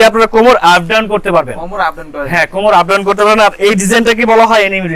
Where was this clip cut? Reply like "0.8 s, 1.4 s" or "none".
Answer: none